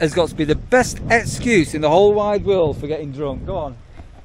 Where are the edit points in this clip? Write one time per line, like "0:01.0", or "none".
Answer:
none